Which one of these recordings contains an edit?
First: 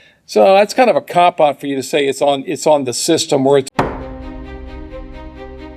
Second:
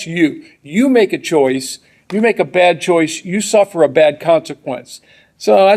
first; 1 cut; at 3.7 s

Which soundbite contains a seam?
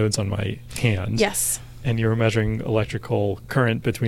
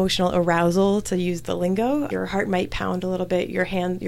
second; 1 cut; at 2.1 s

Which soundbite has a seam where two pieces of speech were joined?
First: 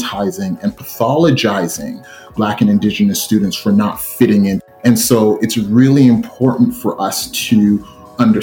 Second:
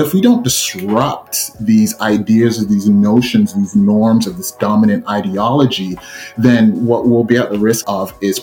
first; 1 cut; at 4.6 s

